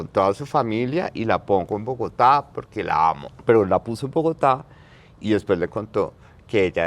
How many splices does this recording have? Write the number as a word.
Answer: one